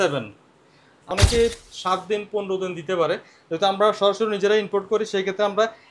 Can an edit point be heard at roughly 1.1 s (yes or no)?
yes